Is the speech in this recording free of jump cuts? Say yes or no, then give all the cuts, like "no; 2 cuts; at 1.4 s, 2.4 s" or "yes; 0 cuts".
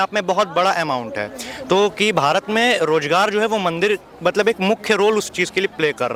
yes; 0 cuts